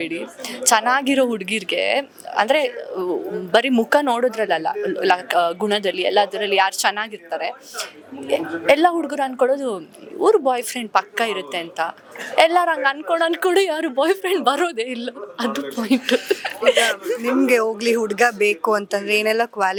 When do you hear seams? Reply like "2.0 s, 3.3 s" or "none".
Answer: none